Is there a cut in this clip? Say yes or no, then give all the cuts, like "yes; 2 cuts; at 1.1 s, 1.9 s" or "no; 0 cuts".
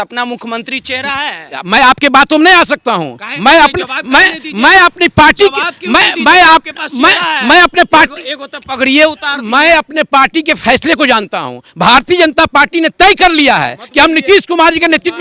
no; 0 cuts